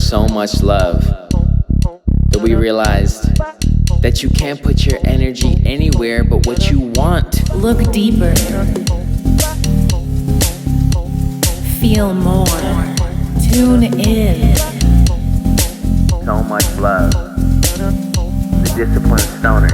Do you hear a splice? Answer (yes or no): yes